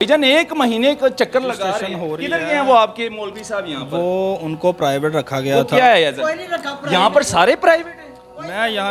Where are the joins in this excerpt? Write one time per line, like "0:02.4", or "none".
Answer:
none

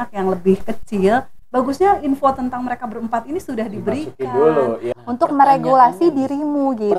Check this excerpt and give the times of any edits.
0:04.8

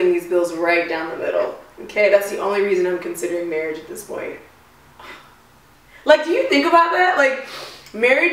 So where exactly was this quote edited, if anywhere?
0:05.8

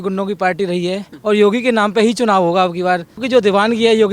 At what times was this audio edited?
0:01.1
0:03.2

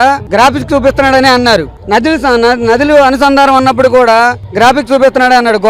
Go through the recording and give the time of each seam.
none

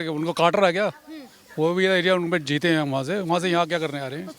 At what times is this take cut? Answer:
none

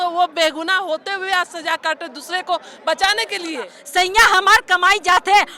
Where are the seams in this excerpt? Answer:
0:03.8

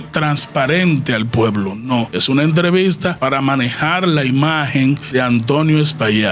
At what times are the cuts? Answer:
0:02.1
0:03.2
0:05.0

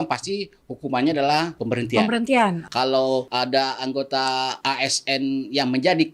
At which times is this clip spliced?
0:01.6
0:02.9
0:04.6

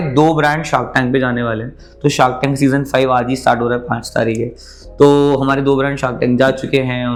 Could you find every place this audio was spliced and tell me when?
none

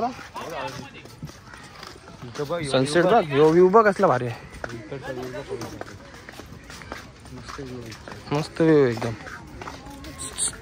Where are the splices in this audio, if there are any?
none

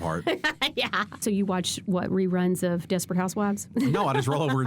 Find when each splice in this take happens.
0:01.2

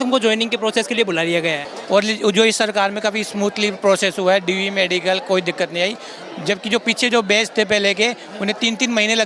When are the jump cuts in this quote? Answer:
0:01.6

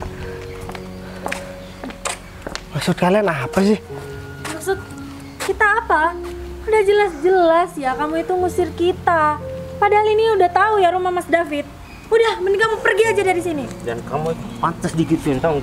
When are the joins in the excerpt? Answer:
none

